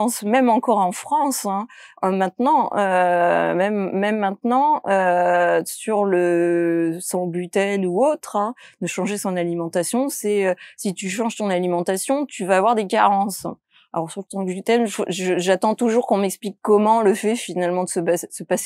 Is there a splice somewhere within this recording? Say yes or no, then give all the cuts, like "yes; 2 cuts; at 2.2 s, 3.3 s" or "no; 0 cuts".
no; 0 cuts